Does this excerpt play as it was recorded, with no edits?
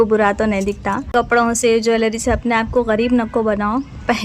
no; 1 cut; at 1.1 s

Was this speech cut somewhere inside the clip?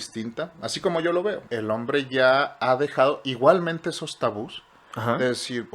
yes; 1 cut; at 1.5 s

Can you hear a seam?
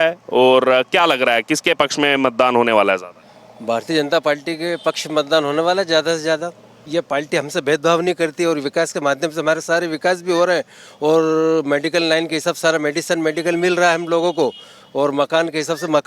yes; 1 cut; at 6.8 s

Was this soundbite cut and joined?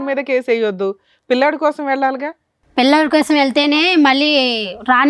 no; 0 cuts

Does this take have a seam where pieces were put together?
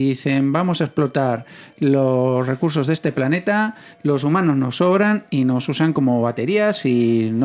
no; 0 cuts

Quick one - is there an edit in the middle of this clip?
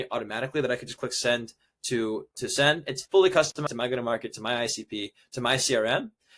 yes; 1 cut; at 3.7 s

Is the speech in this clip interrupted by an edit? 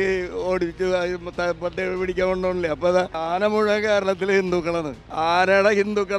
yes; 2 cuts; at 3.2 s, 5.0 s

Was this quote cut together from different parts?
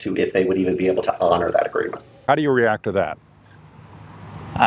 yes; 1 cut; at 2.2 s

